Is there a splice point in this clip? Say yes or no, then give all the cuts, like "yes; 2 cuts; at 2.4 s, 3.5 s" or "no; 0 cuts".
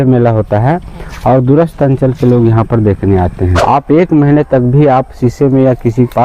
yes; 1 cut; at 3.6 s